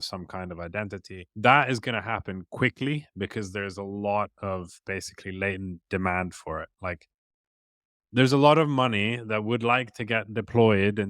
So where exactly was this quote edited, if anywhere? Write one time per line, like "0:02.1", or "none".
0:01.2